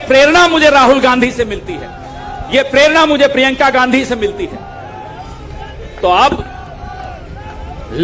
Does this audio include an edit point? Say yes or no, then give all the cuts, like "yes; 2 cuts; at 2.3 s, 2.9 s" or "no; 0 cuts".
no; 0 cuts